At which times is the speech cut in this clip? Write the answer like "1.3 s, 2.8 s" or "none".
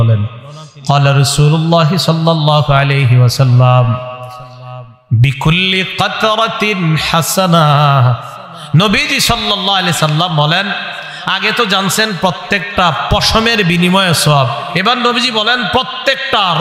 none